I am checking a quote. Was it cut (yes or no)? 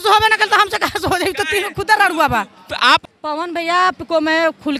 yes